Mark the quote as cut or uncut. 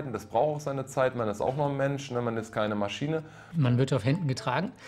cut